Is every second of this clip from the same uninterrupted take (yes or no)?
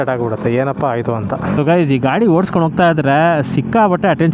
no